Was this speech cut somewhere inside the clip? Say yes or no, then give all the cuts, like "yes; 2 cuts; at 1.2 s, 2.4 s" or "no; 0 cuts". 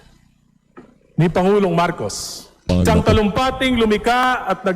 yes; 1 cut; at 2.7 s